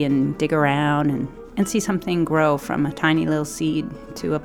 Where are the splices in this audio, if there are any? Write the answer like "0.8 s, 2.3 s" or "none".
none